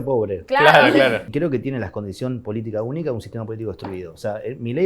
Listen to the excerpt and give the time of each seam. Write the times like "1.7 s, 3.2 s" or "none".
1.2 s